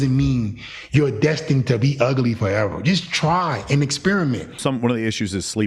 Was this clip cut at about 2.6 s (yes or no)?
no